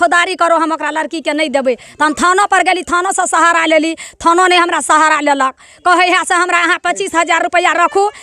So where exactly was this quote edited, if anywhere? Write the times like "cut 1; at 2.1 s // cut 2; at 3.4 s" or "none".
none